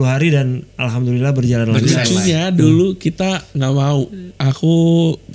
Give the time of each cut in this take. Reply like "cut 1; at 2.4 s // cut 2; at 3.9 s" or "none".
cut 1; at 2.0 s